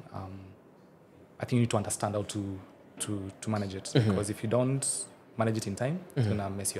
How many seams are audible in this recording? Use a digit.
0